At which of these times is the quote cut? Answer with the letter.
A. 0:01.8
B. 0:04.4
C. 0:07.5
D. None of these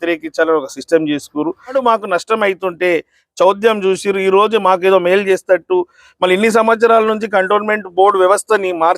A